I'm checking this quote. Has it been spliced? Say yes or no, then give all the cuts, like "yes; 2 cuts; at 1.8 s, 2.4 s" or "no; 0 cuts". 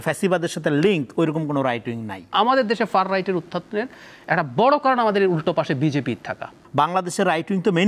yes; 2 cuts; at 2.3 s, 6.6 s